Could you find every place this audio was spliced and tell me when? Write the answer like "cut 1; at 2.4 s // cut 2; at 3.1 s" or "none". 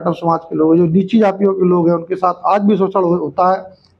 none